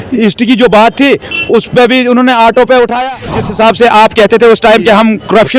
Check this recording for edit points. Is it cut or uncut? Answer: cut